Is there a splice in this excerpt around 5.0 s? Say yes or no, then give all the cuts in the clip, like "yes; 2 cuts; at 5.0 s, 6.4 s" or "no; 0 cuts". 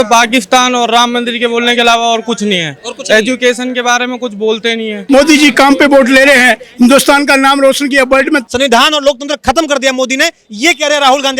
yes; 2 cuts; at 5.0 s, 8.5 s